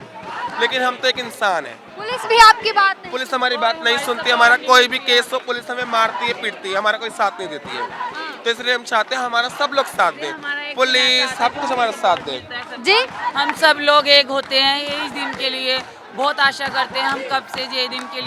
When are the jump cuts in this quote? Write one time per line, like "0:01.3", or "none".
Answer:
none